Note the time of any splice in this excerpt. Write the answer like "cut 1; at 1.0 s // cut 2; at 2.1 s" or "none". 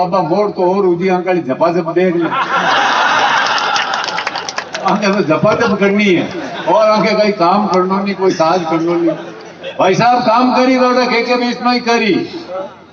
none